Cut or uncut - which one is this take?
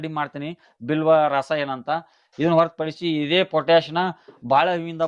uncut